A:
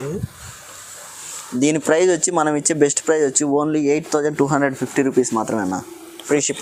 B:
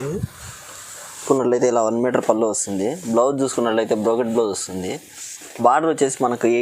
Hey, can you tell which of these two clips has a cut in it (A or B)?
B